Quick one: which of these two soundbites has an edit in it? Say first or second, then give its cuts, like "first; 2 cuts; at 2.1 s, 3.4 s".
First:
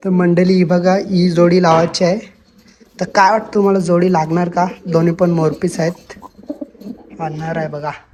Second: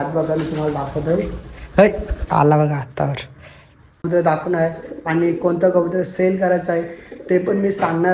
second; 1 cut; at 4.0 s